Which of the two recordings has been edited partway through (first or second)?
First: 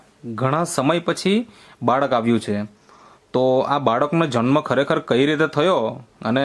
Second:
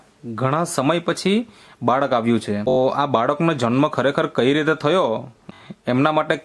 second